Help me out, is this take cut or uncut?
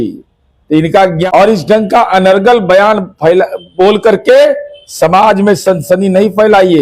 cut